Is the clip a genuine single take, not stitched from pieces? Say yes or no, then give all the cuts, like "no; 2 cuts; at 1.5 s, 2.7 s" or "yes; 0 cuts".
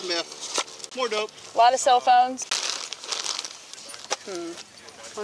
no; 3 cuts; at 1.4 s, 2.5 s, 3.8 s